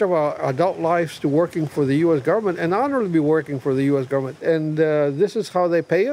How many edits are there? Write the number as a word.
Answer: one